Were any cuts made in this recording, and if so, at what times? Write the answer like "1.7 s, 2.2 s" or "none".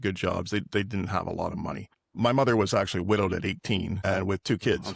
1.9 s